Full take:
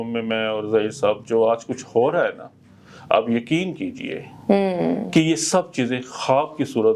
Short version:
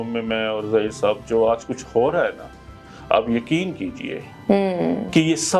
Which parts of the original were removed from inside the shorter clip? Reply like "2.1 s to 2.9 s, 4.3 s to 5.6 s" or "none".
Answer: none